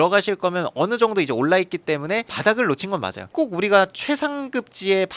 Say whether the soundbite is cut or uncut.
uncut